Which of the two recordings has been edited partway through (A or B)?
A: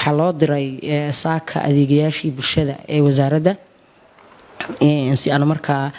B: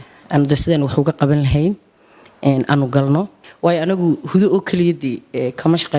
B